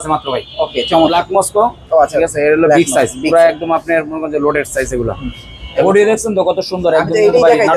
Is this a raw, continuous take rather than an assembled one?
no; 2 cuts; at 1.1 s, 5.8 s

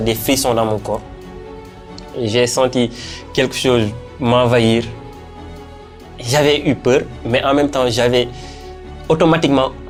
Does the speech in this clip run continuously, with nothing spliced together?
yes; 0 cuts

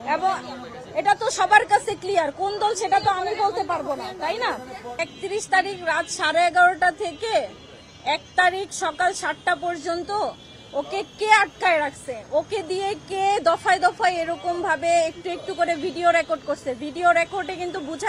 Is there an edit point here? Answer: yes; 1 cut; at 5.0 s

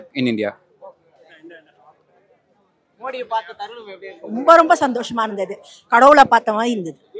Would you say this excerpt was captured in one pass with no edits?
yes; 0 cuts

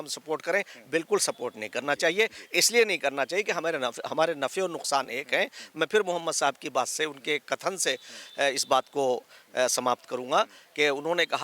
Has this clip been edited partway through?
no; 0 cuts

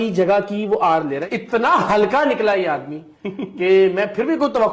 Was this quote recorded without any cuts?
no; 1 cut; at 1.2 s

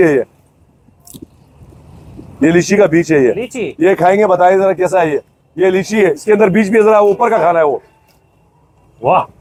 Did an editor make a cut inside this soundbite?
no; 0 cuts

